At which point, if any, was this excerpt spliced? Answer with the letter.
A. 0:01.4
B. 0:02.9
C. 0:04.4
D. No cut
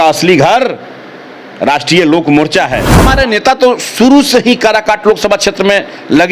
B